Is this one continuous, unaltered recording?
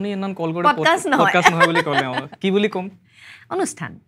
yes; 0 cuts

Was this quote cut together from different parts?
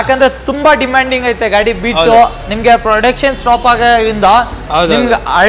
no; 0 cuts

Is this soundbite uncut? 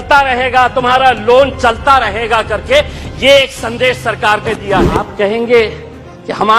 no; 1 cut; at 5.1 s

